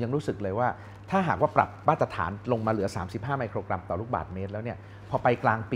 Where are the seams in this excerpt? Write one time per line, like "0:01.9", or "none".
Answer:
none